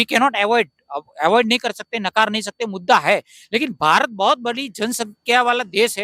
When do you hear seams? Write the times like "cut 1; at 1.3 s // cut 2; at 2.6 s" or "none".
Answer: none